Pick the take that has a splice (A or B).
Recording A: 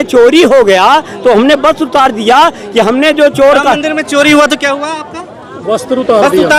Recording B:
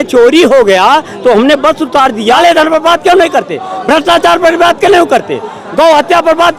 B